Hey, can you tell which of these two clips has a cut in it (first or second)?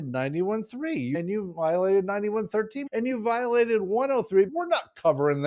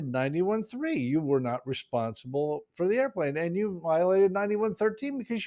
first